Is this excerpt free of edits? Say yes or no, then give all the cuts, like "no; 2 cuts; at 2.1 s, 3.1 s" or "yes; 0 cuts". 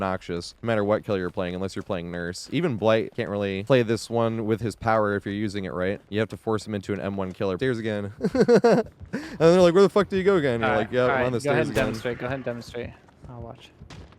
no; 1 cut; at 7.6 s